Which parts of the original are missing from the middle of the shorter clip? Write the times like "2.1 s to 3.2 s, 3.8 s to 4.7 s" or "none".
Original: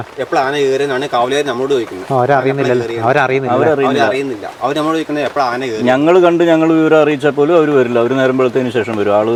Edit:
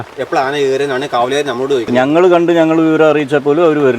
1.9 s to 5.8 s